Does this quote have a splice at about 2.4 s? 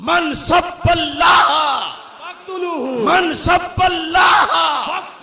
no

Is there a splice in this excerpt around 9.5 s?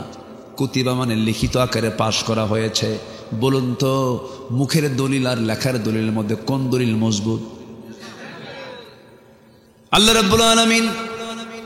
yes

